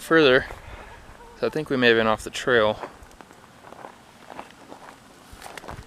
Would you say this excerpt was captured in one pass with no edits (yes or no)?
yes